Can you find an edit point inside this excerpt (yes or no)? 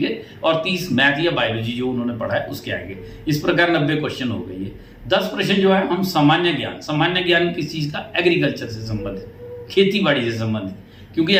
no